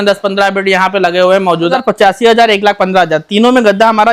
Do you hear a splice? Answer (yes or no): yes